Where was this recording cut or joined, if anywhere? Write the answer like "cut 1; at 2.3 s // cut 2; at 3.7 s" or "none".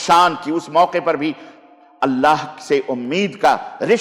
none